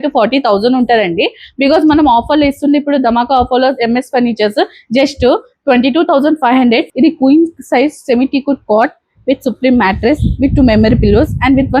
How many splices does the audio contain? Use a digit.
1